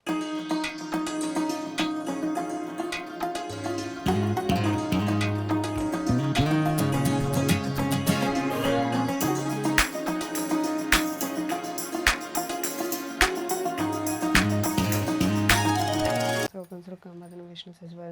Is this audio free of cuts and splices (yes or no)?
no